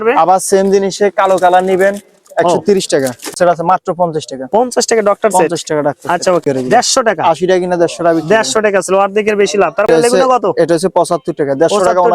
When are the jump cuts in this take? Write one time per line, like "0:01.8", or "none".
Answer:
0:03.4
0:06.4
0:09.9